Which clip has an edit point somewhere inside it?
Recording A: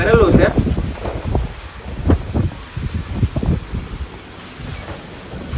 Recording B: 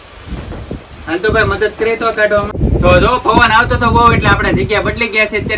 B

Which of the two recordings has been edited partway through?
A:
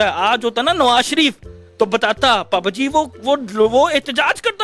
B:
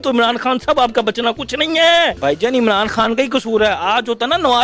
B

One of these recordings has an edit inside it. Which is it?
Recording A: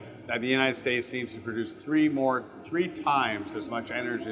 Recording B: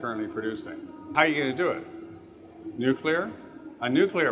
B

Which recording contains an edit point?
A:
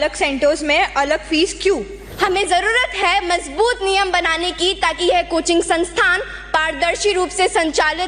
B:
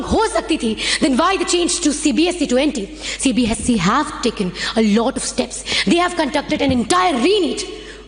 A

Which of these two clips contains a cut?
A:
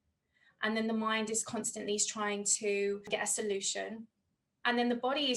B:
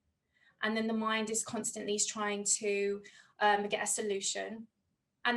A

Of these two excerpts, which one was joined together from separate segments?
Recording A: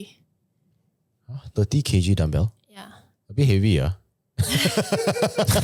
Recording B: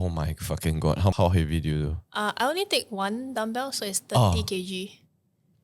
B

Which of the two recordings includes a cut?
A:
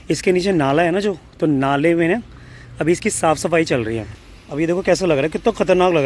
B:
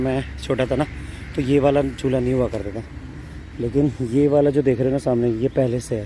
A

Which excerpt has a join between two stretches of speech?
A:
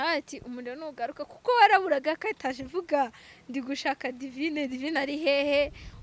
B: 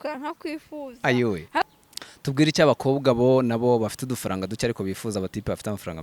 B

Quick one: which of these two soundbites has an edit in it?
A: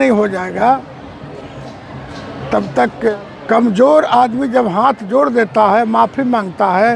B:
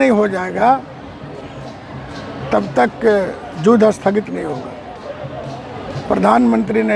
A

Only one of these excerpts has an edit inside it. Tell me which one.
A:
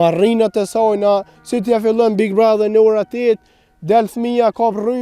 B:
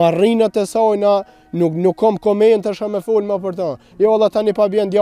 A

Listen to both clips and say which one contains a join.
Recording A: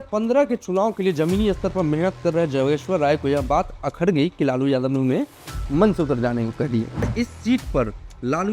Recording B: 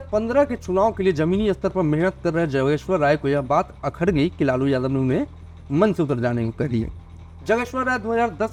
A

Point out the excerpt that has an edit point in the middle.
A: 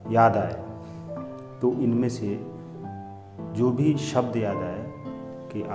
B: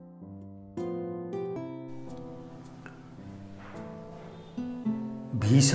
B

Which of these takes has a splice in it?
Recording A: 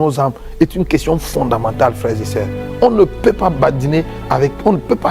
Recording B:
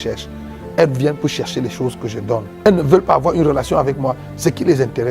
B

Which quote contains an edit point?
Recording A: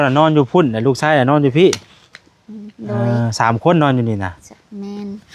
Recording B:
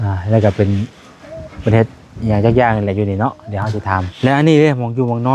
B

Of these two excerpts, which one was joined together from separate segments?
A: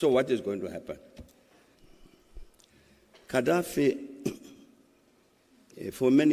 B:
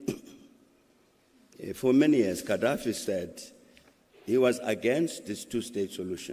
A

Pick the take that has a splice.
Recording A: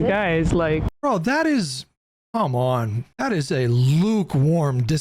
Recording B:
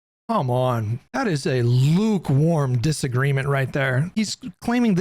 B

